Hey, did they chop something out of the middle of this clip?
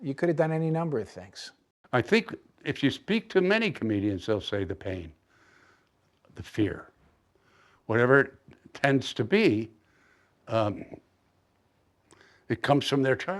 yes; 1 cut; at 1.6 s

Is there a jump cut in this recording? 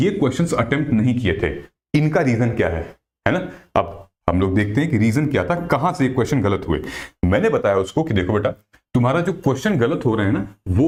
no; 0 cuts

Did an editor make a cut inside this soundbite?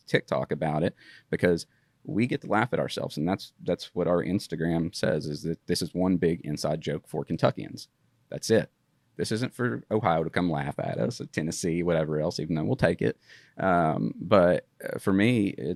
no; 0 cuts

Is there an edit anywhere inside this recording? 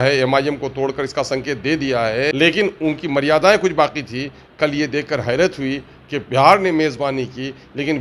yes; 1 cut; at 2.3 s

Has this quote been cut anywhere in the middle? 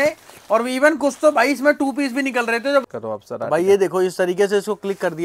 yes; 1 cut; at 2.9 s

